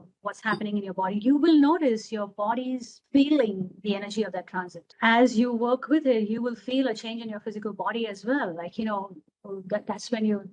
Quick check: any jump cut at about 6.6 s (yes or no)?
no